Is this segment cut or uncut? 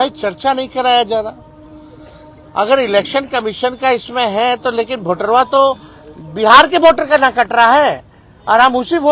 uncut